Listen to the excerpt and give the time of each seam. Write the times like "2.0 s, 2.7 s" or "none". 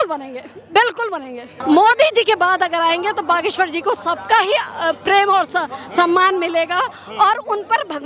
1.6 s